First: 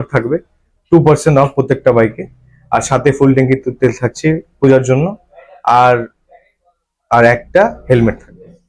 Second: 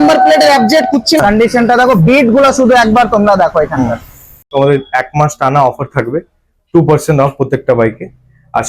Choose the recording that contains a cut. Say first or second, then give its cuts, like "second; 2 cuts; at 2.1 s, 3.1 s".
second; 2 cuts; at 1.2 s, 4.4 s